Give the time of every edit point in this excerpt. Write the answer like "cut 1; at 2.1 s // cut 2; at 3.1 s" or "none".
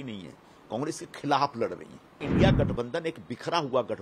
cut 1; at 2.3 s